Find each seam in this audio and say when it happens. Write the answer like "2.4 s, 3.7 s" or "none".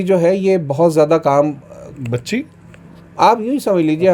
none